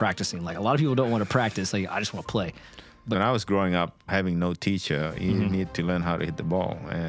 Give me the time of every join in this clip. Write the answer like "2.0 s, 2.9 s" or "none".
3.2 s